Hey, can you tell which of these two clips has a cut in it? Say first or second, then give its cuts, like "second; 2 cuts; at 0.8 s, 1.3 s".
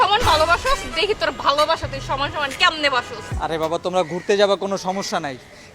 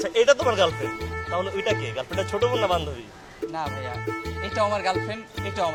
first; 1 cut; at 3.2 s